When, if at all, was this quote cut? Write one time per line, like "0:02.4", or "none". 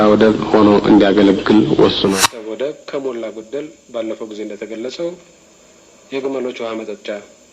0:02.2